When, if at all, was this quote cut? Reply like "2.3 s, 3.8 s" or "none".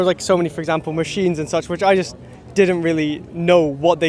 none